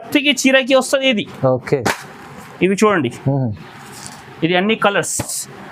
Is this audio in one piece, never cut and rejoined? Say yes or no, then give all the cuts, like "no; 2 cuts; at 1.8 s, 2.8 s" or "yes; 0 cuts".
yes; 0 cuts